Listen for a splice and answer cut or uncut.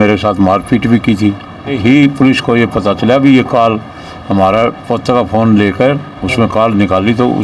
cut